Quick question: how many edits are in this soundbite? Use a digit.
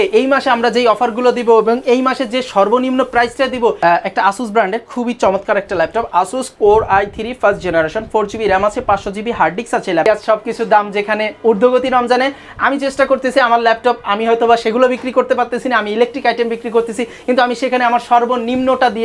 2